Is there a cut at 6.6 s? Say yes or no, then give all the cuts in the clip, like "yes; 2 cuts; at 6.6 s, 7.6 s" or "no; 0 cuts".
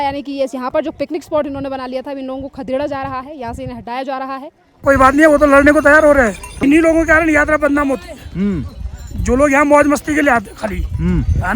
yes; 2 cuts; at 4.7 s, 6.6 s